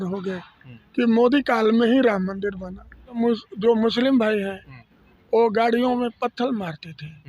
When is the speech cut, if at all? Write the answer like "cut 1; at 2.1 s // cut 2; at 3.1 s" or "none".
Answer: cut 1; at 3.2 s